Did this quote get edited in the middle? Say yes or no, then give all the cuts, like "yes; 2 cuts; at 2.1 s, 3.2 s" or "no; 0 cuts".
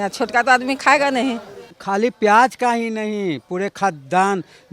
yes; 1 cut; at 1.7 s